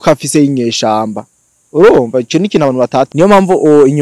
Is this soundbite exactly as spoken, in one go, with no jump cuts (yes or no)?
no